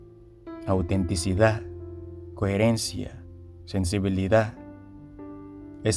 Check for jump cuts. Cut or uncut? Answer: uncut